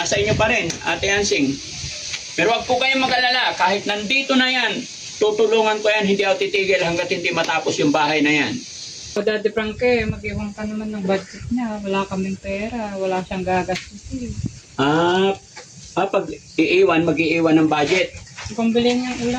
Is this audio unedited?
no; 1 cut; at 8.9 s

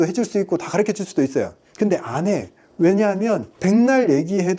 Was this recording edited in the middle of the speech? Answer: yes; 1 cut; at 3.5 s

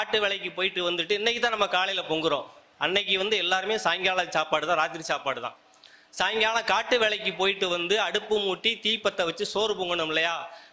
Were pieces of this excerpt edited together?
no; 0 cuts

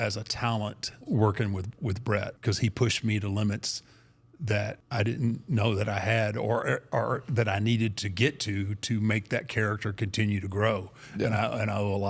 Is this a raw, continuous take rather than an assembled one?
no; 3 cuts; at 0.9 s, 2.3 s, 4.8 s

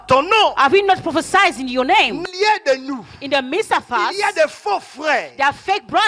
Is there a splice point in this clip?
yes; 1 cut; at 2.2 s

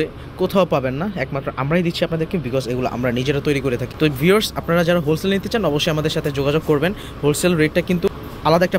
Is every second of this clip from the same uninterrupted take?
yes; 0 cuts

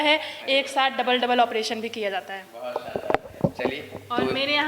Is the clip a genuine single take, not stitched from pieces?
yes; 0 cuts

